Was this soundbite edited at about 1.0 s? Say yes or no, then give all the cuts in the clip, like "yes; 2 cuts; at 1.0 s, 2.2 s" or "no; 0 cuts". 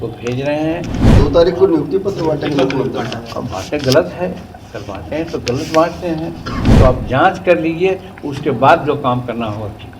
yes; 2 cuts; at 1.0 s, 6.7 s